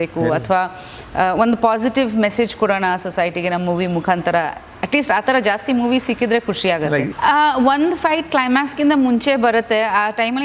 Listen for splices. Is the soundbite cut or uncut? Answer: cut